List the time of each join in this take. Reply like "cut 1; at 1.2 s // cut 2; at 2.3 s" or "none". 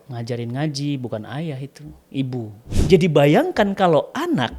cut 1; at 2.7 s

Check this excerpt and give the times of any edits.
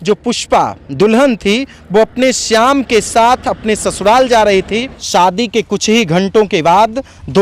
cut 1; at 4.9 s

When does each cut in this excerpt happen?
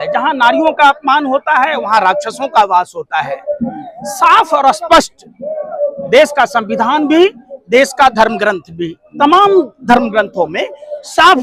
none

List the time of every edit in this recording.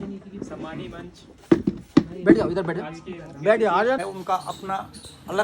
none

